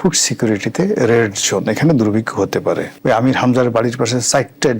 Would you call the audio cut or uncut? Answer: cut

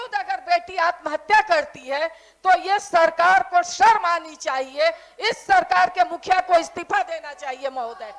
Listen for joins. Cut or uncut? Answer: uncut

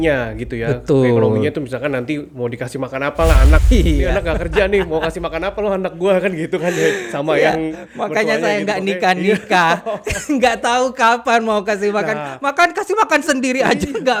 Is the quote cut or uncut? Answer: uncut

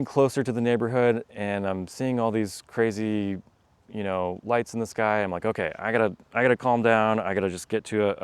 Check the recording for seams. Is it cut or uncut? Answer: uncut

